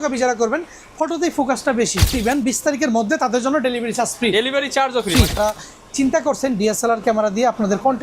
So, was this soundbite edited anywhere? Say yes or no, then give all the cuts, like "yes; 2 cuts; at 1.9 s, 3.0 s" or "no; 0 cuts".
yes; 2 cuts; at 2.2 s, 5.4 s